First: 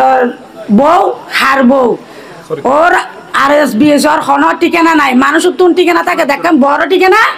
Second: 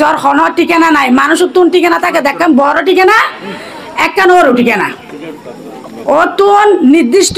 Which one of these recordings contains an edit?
second; 1 cut; at 5.9 s

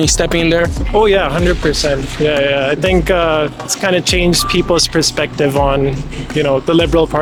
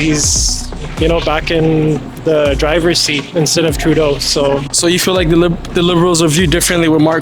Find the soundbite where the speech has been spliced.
second; 1 cut; at 4.7 s

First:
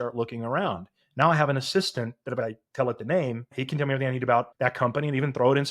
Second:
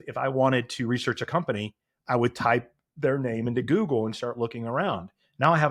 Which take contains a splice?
first; 3 cuts; at 2.4 s, 3.6 s, 4.5 s

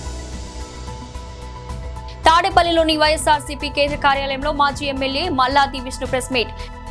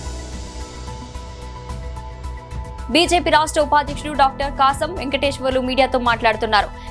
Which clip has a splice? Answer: second; 2 cuts; at 1.8 s, 2.9 s

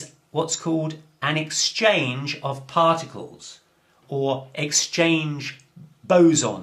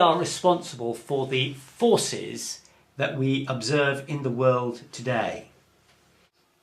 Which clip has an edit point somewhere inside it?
second; 1 cut; at 5.1 s

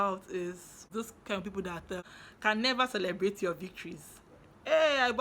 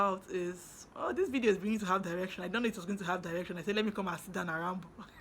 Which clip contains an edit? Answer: first; 2 cuts; at 0.9 s, 2.0 s

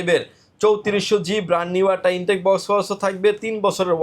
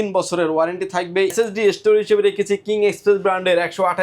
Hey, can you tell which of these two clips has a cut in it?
second; 1 cut; at 1.3 s

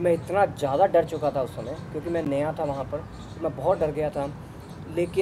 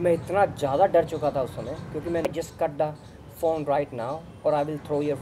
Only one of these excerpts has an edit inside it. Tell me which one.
second; 1 cut; at 2.2 s

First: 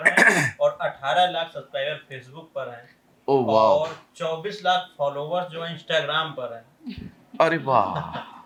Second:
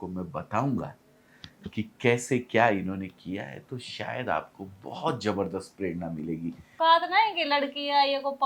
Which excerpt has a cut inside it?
second; 1 cut; at 6.6 s

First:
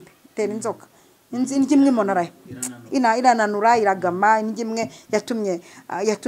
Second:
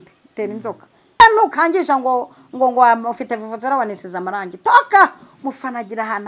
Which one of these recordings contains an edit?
second; 1 cut; at 1.2 s

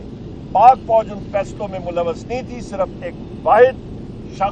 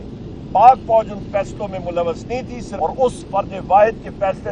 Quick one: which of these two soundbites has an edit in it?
second; 1 cut; at 2.6 s

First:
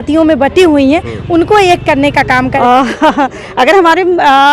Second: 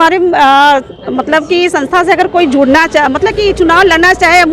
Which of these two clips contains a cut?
first; 1 cut; at 2.6 s

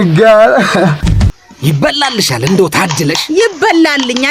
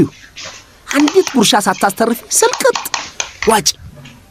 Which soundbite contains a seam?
first; 1 cut; at 1.3 s

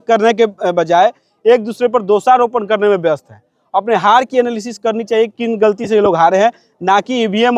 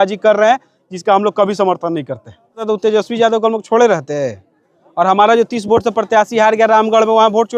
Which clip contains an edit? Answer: second; 1 cut; at 2.6 s

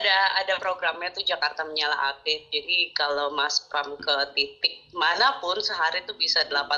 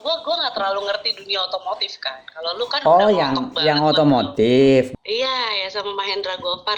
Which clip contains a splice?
second; 1 cut; at 4.9 s

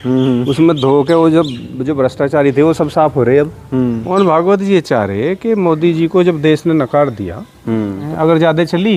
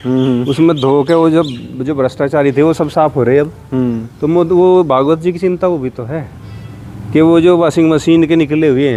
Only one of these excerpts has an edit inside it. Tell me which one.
first; 2 cuts; at 4.0 s, 8.0 s

